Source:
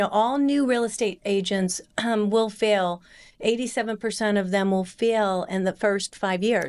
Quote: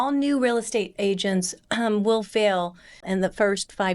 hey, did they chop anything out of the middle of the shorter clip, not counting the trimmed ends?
yes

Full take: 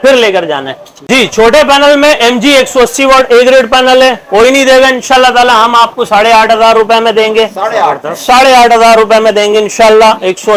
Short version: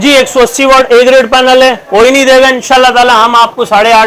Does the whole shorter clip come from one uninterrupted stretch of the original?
yes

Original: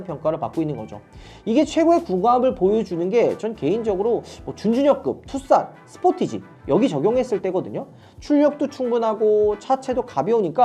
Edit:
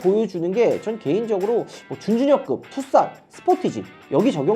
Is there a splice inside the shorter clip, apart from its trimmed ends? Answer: no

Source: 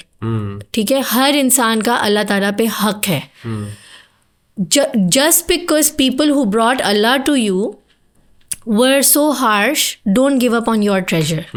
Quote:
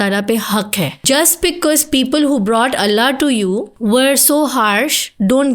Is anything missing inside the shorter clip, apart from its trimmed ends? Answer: yes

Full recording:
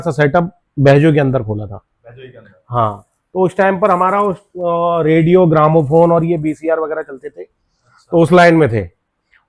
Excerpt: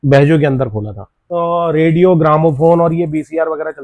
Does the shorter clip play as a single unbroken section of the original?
no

